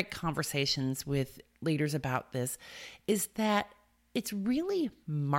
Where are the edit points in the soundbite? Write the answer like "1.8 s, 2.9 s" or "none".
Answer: none